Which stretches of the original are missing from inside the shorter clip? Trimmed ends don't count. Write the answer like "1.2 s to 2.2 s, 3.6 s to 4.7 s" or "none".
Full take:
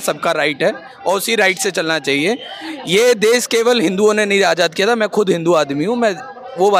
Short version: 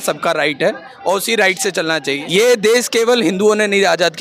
2.2 s to 2.8 s

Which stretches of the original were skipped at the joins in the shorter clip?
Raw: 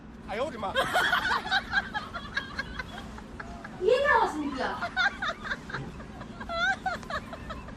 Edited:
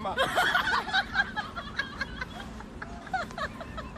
3.7 s to 6.8 s

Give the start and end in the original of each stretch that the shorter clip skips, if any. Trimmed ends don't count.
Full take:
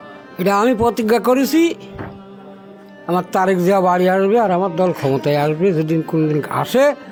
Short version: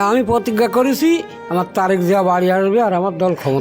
1.9 s to 2.9 s

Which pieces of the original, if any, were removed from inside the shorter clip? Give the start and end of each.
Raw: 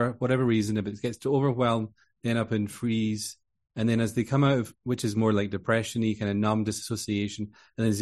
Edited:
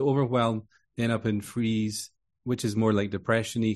3.6 s to 4.7 s

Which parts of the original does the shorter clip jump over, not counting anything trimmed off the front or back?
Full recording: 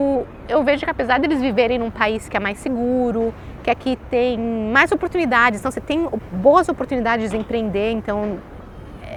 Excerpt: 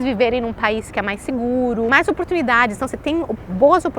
3.3 s to 4.7 s

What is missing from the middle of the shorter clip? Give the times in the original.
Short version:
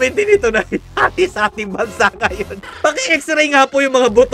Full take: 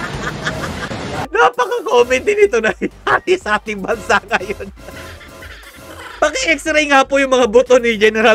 4.7 s to 6.0 s

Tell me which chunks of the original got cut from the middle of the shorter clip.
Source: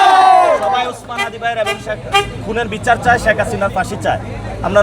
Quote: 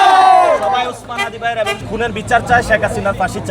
1.8 s to 2.4 s

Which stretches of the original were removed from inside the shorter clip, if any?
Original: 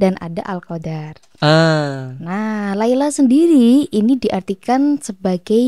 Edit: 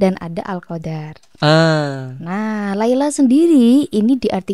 none

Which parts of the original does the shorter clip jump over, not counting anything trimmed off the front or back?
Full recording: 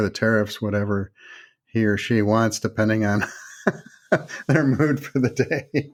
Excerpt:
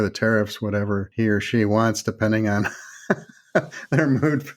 1.1 s to 1.6 s

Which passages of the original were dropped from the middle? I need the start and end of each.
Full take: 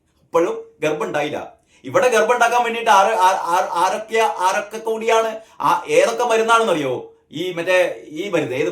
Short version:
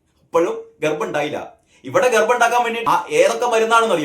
2.8 s to 5.5 s

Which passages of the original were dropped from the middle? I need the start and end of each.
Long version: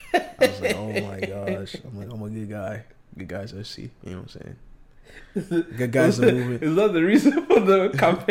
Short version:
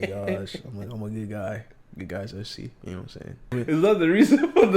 4.8 s to 6.5 s

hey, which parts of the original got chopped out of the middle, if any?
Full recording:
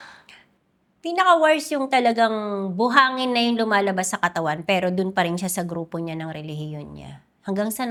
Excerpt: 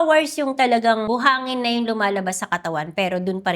2.4 s to 2.7 s

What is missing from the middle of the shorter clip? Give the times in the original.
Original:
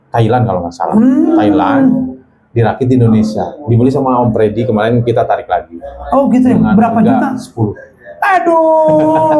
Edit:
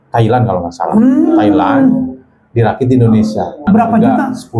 3.7 s to 6.7 s

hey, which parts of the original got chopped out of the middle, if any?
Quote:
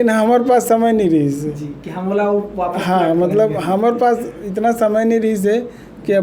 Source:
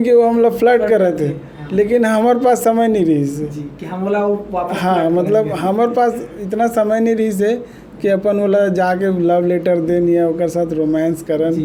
none

